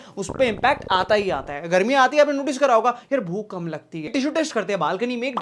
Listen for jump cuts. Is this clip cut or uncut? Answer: cut